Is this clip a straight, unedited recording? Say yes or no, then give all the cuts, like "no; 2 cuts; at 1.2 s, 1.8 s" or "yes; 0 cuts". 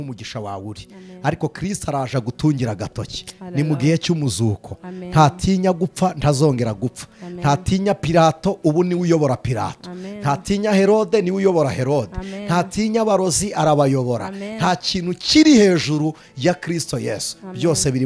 yes; 0 cuts